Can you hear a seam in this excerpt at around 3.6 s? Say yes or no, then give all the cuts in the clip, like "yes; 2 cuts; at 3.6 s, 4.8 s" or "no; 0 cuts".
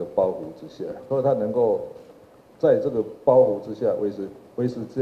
no; 1 cut; at 1.0 s